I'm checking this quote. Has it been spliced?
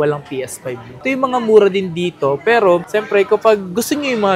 yes; 1 cut; at 1.0 s

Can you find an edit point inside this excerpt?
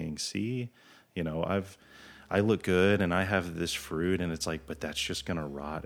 no; 0 cuts

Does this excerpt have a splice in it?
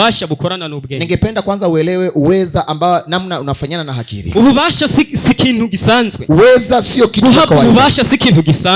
yes; 2 cuts; at 4.2 s, 6.2 s

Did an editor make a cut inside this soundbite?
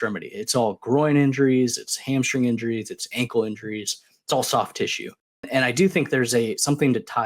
yes; 1 cut; at 5.5 s

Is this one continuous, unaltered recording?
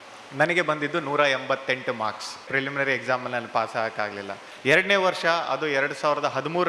no; 2 cuts; at 2.5 s, 4.4 s

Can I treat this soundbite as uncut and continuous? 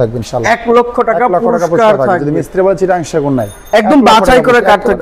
no; 1 cut; at 3.6 s

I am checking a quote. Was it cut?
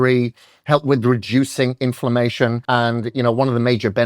yes; 1 cut; at 2.6 s

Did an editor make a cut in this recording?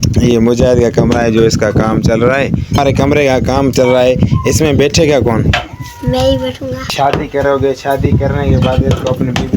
yes; 2 cuts; at 2.8 s, 6.9 s

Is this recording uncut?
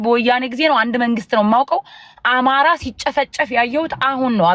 yes; 0 cuts

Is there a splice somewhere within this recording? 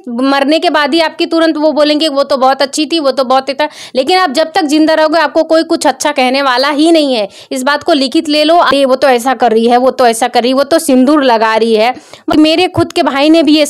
yes; 2 cuts; at 8.7 s, 12.3 s

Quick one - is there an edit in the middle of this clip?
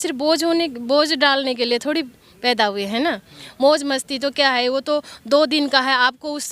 no; 0 cuts

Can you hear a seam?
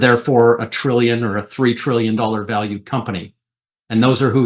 no; 0 cuts

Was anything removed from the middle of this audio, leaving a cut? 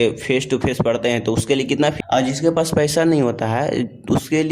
yes; 1 cut; at 2.0 s

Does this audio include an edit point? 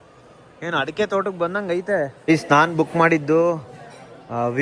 yes; 1 cut; at 2.2 s

